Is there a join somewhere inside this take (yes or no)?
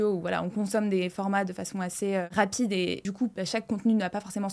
yes